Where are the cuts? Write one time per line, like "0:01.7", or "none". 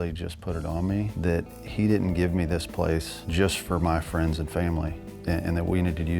0:01.1
0:03.2
0:05.1